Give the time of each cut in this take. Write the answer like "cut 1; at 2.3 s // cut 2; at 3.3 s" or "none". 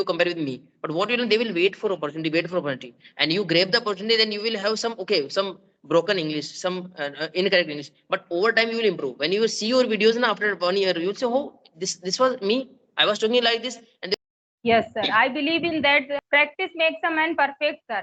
cut 1; at 14.1 s // cut 2; at 16.2 s